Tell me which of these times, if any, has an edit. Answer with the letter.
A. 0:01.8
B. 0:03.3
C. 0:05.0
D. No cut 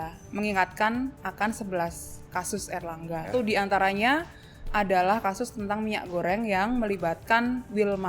B